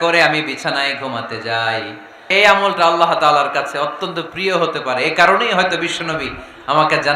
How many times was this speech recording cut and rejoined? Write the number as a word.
one